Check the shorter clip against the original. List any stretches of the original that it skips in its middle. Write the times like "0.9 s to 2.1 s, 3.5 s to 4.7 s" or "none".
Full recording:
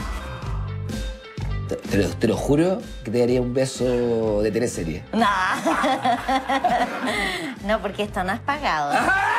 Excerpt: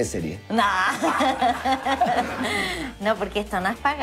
none